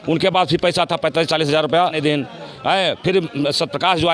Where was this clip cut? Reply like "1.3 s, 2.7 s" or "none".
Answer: 2.0 s